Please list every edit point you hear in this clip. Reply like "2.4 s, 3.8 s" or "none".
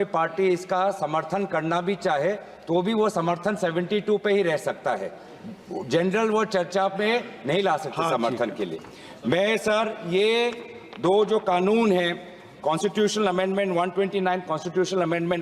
none

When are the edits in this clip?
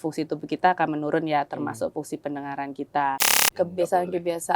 3.4 s

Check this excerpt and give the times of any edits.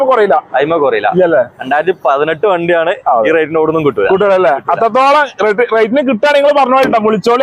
none

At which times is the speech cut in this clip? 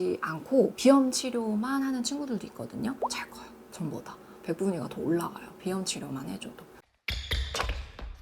3.0 s, 6.7 s

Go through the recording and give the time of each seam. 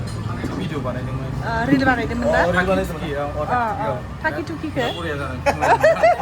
none

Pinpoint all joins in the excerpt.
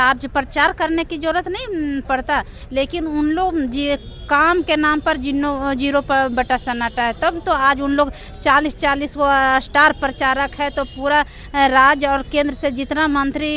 none

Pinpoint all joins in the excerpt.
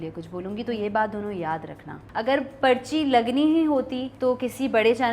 2.0 s, 4.0 s

